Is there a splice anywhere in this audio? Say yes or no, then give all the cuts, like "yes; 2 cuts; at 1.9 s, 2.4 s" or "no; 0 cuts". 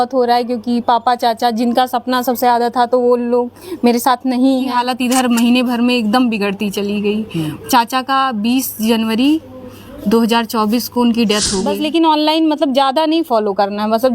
yes; 2 cuts; at 4.7 s, 11.7 s